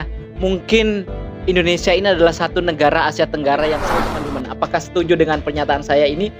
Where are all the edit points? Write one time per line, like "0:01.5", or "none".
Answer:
0:04.1